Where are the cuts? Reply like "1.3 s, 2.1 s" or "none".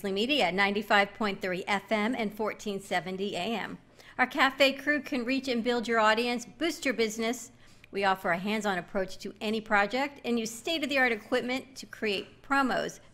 none